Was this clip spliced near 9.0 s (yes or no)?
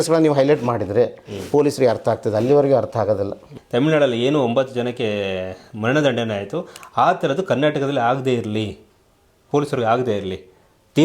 no